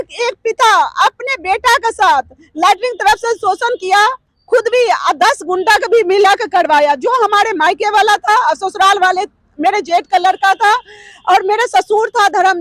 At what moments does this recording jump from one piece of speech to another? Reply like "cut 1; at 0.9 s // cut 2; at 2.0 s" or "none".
none